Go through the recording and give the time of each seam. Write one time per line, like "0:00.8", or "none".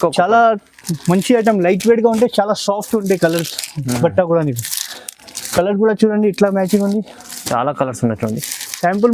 none